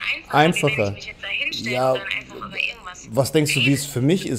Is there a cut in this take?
no; 0 cuts

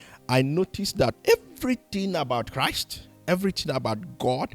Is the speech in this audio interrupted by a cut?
yes; 1 cut; at 1.2 s

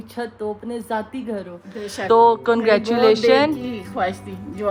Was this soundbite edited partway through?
no; 0 cuts

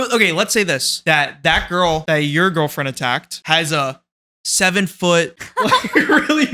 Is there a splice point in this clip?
yes; 4 cuts; at 0.9 s, 2.0 s, 3.3 s, 5.4 s

